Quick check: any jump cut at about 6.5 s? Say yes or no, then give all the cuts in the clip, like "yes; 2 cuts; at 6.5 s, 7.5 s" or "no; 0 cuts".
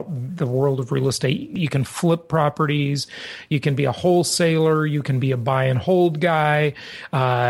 no; 1 cut; at 1.5 s